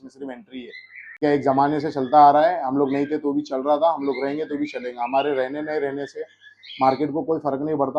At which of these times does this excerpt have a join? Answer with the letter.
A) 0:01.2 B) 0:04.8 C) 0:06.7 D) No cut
A